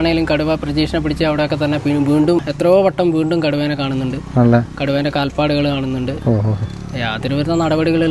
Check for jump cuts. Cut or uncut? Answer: cut